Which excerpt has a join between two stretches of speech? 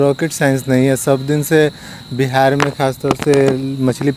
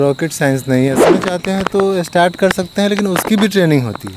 second; 1 cut; at 1.1 s

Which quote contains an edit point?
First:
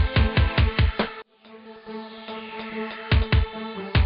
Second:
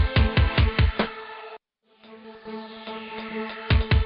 first; 1 cut; at 1.2 s

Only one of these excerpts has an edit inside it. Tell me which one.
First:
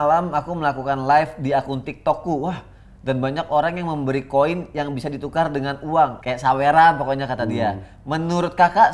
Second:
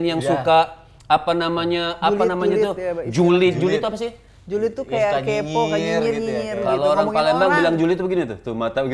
first; 1 cut; at 6.2 s

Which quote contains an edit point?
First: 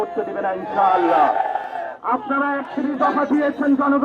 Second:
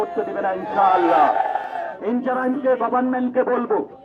second; 1 cut; at 1.9 s

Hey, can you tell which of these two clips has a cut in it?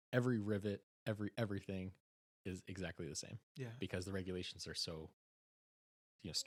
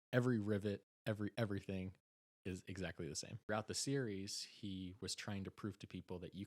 second; 1 cut; at 3.5 s

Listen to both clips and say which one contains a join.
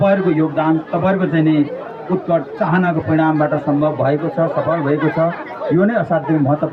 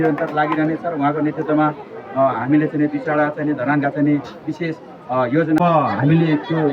second; 1 cut; at 5.6 s

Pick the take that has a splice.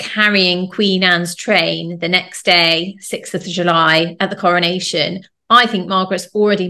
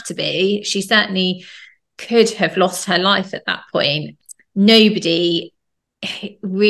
second; 1 cut; at 4.1 s

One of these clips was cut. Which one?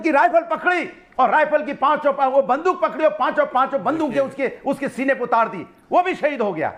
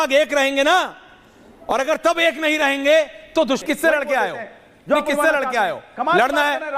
second; 1 cut; at 3.6 s

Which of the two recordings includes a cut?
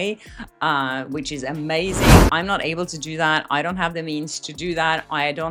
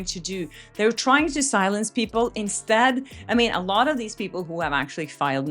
second; 1 cut; at 3.1 s

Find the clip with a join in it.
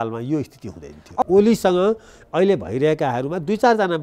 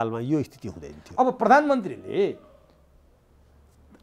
first; 1 cut; at 1.2 s

